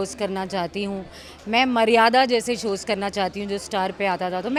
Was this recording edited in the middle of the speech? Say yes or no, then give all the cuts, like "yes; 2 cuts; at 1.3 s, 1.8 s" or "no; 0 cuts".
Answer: no; 0 cuts